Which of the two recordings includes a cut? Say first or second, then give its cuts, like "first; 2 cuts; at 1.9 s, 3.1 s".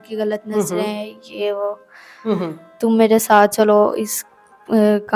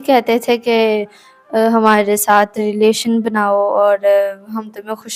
first; 1 cut; at 2.2 s